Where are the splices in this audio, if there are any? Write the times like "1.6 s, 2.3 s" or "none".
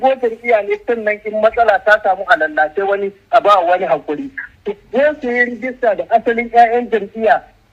none